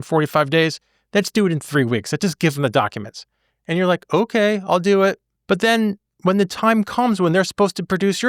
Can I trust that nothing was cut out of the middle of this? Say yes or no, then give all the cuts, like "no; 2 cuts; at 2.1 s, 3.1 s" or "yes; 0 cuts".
no; 1 cut; at 5.3 s